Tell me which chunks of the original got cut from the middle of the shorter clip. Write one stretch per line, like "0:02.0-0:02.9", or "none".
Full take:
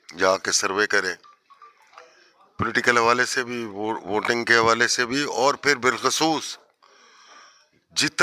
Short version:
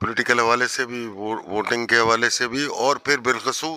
none